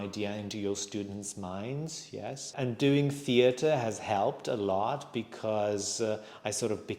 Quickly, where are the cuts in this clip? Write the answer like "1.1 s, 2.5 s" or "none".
2.5 s